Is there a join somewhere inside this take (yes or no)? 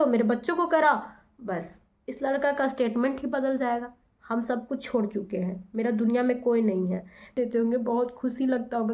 yes